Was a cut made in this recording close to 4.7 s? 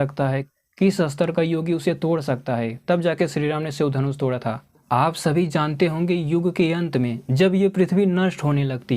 yes; 1 cut; at 4.7 s

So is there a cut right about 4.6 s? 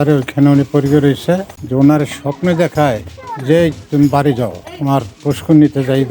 no; 1 cut; at 1.5 s

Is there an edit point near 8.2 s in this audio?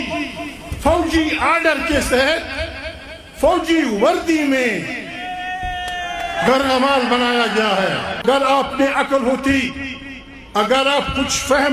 yes; 1 cut; at 8.2 s

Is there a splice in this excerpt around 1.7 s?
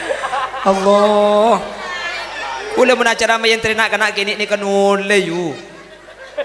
no; 0 cuts

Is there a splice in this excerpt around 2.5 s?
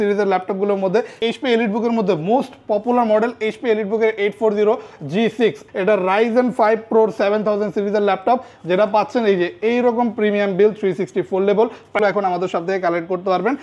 no; 3 cuts; at 1.2 s, 5.6 s, 12.0 s

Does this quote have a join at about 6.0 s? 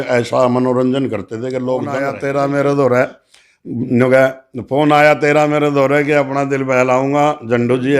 no; 1 cut; at 2.1 s

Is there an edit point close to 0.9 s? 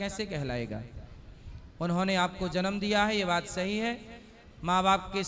no; 0 cuts

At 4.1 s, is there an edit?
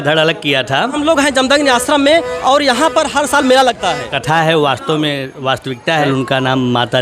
yes; 3 cuts; at 1.0 s, 4.1 s, 6.1 s

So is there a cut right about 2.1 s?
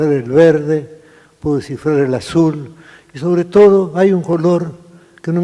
no; 1 cut; at 3.4 s

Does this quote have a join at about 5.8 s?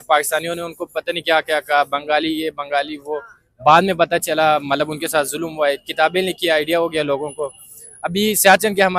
no; 0 cuts

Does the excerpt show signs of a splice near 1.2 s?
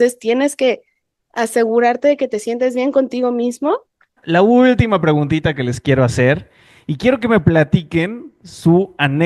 no; 1 cut; at 4.1 s

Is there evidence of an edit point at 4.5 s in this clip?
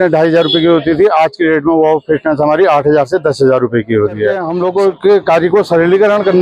yes; 1 cut; at 4.5 s

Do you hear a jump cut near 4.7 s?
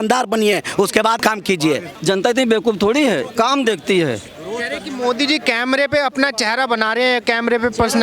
no; 1 cut; at 1.4 s

